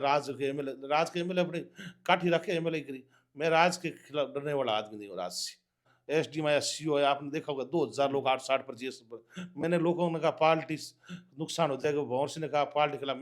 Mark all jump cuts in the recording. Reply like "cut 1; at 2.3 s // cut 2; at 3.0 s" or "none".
cut 1; at 5.9 s